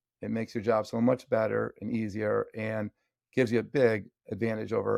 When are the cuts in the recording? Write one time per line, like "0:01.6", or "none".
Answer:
none